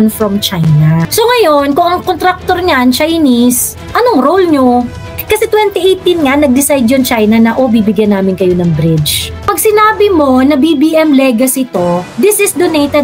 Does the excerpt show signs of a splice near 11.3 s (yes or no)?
no